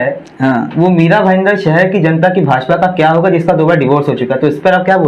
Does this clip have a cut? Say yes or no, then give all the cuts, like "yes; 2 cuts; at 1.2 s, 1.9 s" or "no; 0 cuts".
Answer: no; 0 cuts